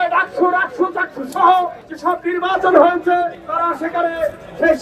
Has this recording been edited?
no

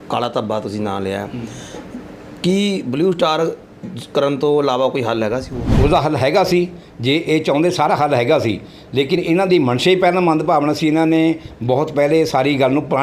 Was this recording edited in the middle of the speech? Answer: yes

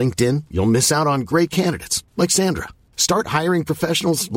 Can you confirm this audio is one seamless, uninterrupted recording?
yes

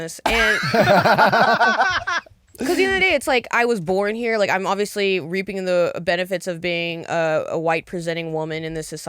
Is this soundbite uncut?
yes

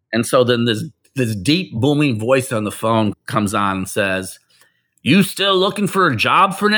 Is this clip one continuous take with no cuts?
yes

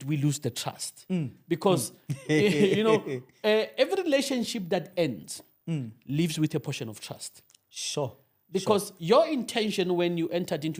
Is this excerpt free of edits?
yes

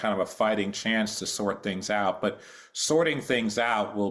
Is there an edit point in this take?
no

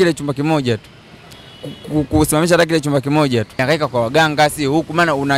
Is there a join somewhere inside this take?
yes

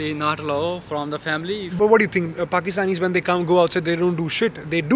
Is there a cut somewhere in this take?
yes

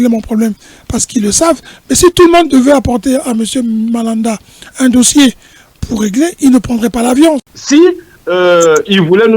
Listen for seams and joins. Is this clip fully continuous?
no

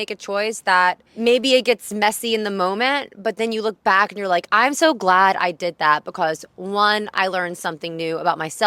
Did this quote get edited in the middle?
yes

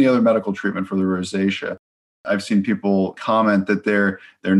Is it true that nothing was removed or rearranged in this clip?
no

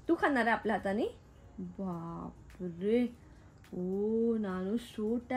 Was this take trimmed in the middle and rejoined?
no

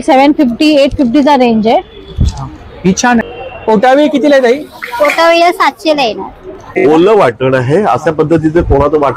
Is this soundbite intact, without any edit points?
no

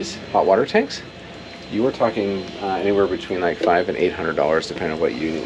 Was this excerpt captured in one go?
yes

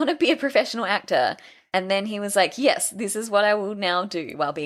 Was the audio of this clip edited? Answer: no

